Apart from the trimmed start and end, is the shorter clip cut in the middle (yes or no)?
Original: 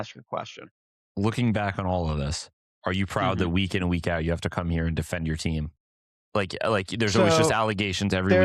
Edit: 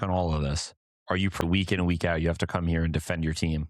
yes